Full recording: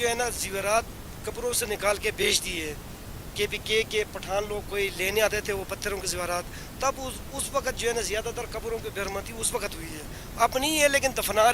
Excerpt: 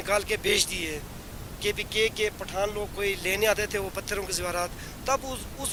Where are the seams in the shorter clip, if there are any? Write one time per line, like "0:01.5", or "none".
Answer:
none